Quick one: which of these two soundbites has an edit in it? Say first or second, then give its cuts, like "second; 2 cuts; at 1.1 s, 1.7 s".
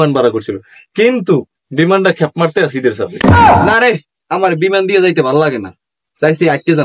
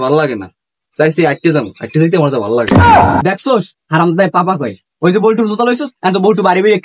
second; 2 cuts; at 2.7 s, 3.2 s